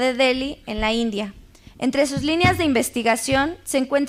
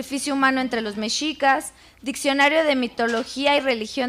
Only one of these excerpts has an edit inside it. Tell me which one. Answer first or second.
second